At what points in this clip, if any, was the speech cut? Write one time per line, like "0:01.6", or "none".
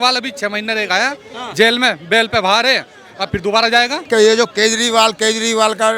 0:04.0